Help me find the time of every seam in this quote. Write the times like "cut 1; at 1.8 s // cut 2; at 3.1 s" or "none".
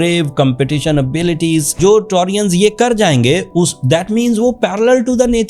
cut 1; at 1.8 s